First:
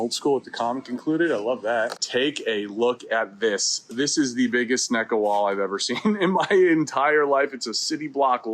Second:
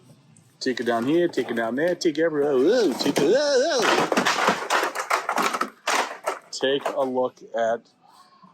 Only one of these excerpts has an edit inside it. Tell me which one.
first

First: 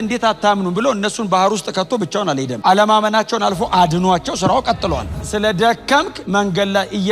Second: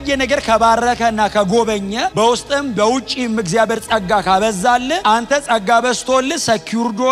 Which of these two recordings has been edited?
first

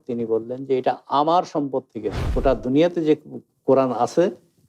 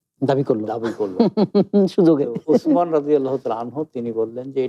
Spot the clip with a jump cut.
first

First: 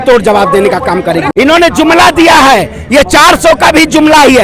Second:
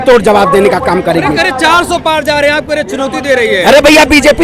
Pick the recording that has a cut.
first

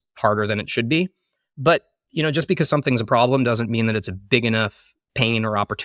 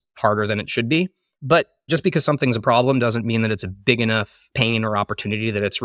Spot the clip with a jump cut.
second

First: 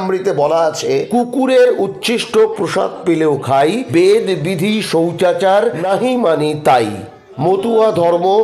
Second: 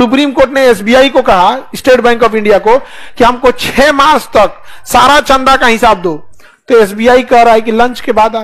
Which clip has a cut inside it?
first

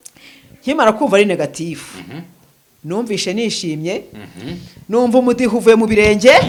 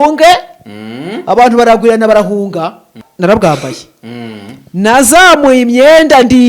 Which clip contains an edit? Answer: second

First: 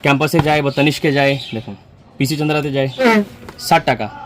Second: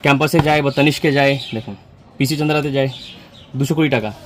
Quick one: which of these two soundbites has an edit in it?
first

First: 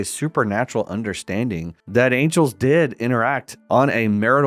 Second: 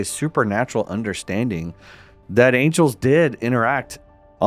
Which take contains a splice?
first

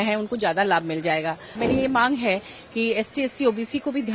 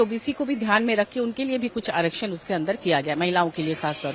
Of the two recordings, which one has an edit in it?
first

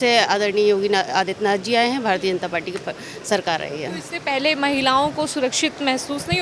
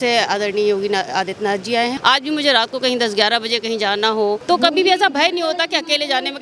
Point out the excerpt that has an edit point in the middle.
second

